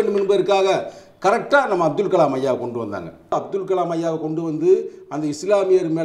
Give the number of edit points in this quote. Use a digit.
1